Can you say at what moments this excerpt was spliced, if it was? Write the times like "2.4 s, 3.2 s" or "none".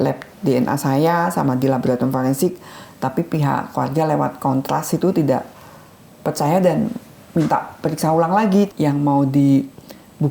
8.7 s